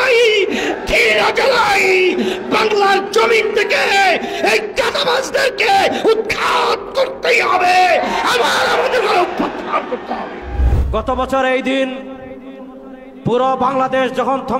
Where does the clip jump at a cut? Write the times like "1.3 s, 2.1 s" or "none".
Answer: 10.7 s